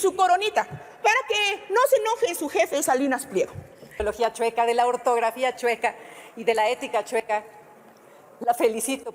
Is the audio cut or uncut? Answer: cut